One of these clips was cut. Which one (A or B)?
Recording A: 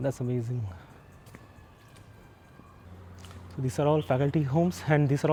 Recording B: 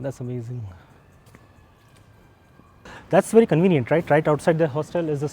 B